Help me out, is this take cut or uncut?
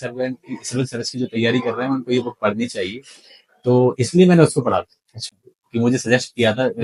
uncut